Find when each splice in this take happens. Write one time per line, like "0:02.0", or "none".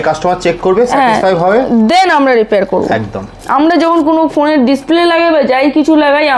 0:03.3